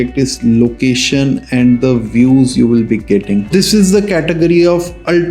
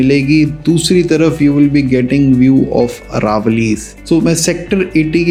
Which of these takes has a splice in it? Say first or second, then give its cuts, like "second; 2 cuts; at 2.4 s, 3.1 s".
first; 1 cut; at 3.5 s